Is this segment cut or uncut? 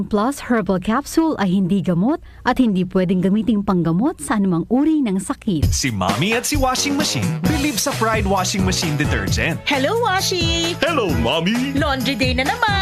cut